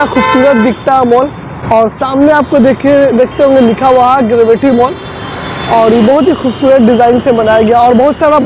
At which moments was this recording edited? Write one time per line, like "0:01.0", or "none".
none